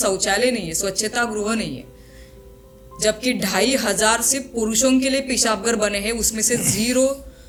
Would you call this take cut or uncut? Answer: uncut